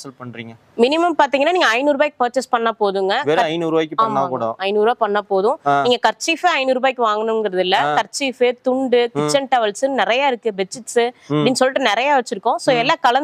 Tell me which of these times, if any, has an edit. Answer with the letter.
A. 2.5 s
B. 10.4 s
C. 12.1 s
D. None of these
D